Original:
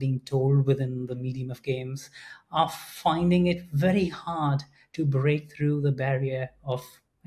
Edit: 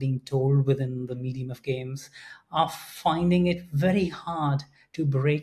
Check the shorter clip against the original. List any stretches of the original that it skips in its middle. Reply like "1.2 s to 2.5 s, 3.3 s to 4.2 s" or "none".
none